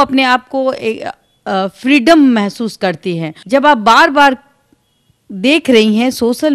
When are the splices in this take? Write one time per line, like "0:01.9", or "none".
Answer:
0:03.3